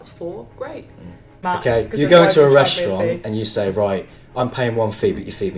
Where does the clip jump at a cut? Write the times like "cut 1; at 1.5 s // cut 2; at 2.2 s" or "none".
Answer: cut 1; at 1.4 s